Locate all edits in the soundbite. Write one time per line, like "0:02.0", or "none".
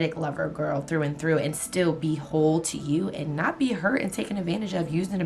none